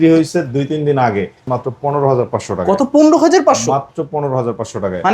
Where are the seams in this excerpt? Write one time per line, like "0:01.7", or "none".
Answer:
0:01.4